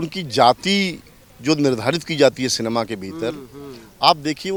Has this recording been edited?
no; 0 cuts

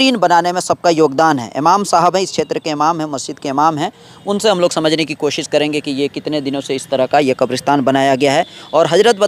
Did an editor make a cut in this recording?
no; 0 cuts

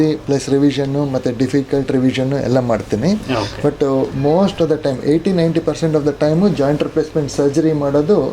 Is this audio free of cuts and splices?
yes; 0 cuts

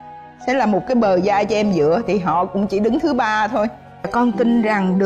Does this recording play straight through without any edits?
no; 1 cut; at 4.1 s

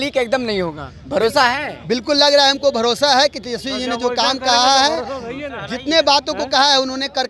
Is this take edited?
no; 0 cuts

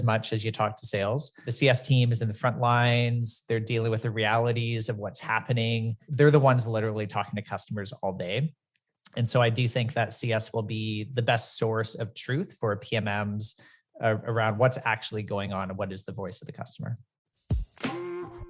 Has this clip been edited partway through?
yes; 3 cuts; at 1.5 s, 6.0 s, 17.4 s

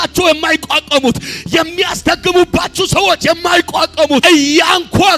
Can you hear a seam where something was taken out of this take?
yes; 1 cut; at 4.2 s

